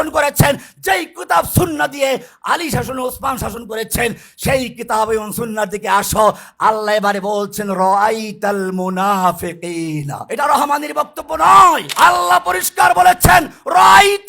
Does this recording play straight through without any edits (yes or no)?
no